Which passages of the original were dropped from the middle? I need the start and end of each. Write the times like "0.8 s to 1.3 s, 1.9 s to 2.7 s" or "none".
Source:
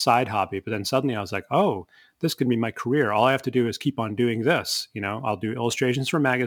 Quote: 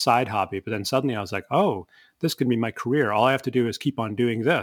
none